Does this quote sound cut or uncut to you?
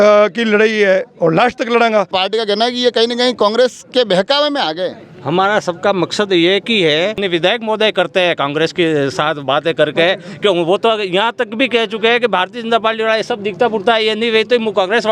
cut